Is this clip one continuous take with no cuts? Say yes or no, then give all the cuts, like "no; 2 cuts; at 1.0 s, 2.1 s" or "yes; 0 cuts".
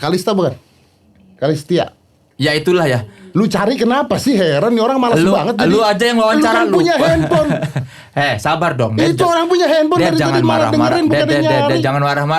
yes; 0 cuts